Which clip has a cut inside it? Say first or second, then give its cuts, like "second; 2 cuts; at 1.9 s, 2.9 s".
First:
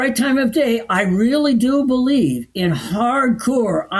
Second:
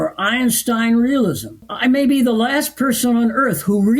second; 1 cut; at 1.7 s